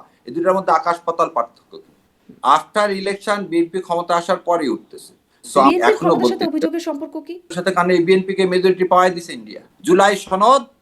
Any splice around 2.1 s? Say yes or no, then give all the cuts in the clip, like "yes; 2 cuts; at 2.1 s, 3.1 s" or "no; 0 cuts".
yes; 4 cuts; at 2.1 s, 5.7 s, 7.6 s, 9.7 s